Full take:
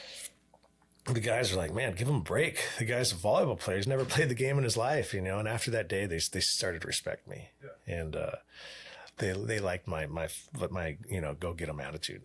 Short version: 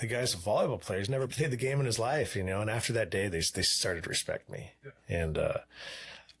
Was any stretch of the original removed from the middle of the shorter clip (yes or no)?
no